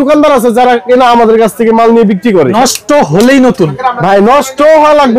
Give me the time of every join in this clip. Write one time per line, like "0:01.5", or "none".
0:02.5

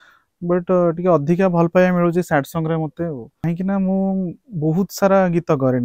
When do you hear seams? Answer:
0:03.3

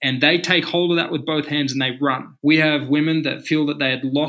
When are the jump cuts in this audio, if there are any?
0:02.3

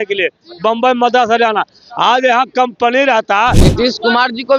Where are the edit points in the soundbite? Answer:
0:03.6

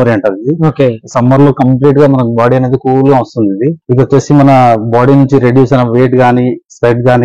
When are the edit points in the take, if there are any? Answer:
0:03.8

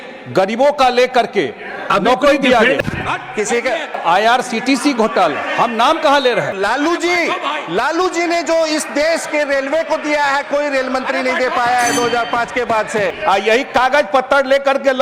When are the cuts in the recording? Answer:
0:02.8
0:04.0
0:06.6
0:13.2

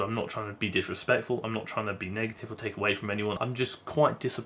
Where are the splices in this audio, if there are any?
0:03.4

